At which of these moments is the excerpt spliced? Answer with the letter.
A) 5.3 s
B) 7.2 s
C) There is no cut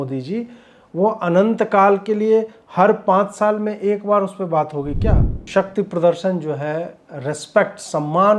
A